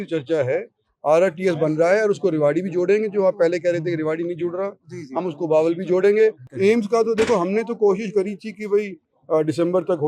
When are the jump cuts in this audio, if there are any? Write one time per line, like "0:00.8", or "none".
0:06.4

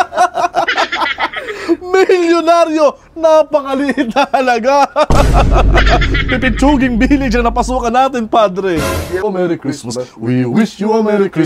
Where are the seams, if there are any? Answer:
0:09.2

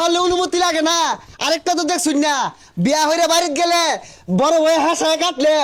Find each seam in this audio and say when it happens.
none

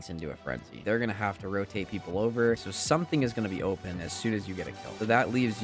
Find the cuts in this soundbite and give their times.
none

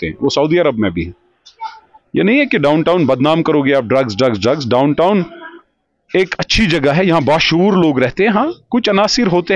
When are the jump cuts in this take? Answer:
none

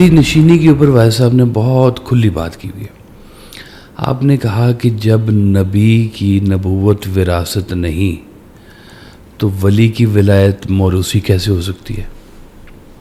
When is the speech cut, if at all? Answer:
none

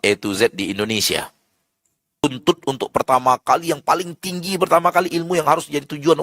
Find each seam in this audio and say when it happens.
0:02.2

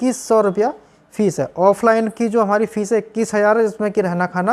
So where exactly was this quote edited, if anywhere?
none

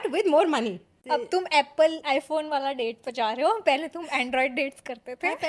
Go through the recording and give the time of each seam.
0:00.9

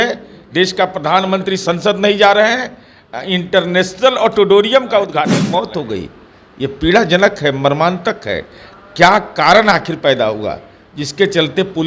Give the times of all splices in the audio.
0:05.4

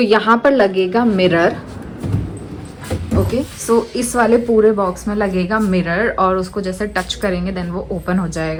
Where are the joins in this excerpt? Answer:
none

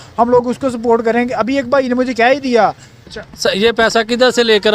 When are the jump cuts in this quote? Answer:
0:02.9

